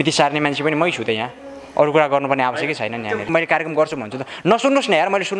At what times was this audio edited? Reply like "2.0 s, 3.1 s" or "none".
3.2 s